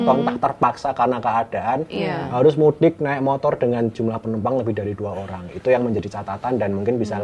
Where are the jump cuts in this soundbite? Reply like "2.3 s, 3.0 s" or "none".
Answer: none